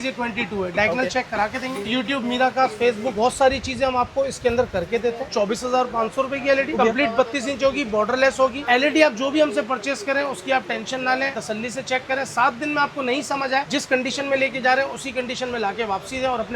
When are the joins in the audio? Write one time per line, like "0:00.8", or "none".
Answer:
0:01.9
0:03.1
0:05.3
0:06.8
0:08.6
0:11.4